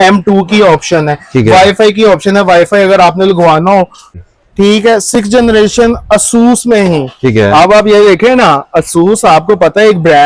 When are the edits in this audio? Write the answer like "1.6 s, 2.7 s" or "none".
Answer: 4.1 s